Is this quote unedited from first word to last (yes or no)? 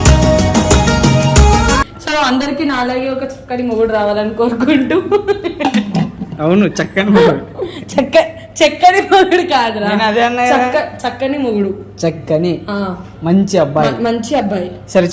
yes